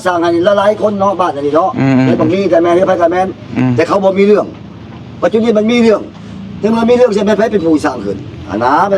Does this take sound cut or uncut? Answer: uncut